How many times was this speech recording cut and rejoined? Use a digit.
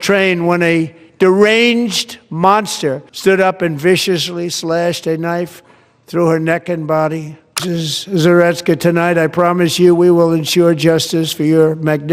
2